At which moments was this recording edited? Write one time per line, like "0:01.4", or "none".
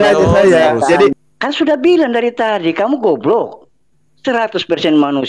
0:01.1